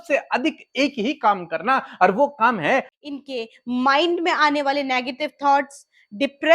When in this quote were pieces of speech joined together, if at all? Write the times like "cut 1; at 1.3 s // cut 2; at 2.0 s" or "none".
cut 1; at 2.9 s